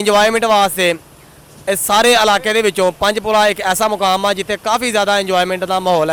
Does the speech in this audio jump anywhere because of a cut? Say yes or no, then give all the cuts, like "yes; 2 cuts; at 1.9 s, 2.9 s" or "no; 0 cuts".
no; 0 cuts